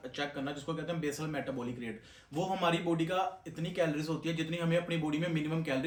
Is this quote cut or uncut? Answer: uncut